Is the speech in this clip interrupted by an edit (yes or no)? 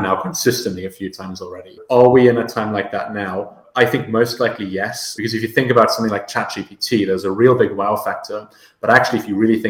yes